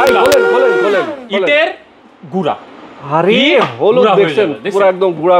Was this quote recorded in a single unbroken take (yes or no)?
yes